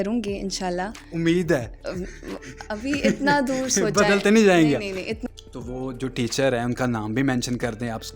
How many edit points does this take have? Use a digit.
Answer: 1